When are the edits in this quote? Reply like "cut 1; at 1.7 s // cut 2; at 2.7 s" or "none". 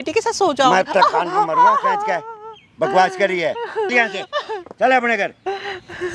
none